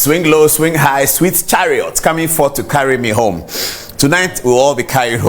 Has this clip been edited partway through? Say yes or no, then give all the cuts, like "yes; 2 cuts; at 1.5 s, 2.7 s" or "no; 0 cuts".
no; 0 cuts